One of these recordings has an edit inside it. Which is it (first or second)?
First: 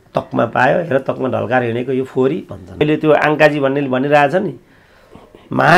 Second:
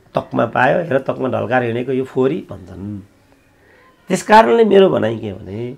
first